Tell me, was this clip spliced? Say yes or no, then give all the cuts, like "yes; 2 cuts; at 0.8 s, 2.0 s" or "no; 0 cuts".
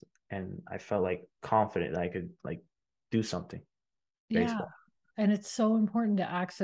yes; 1 cut; at 1.3 s